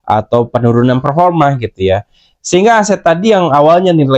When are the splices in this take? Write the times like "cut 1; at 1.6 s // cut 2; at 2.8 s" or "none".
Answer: none